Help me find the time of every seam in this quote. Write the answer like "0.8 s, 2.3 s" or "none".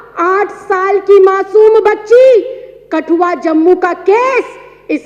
none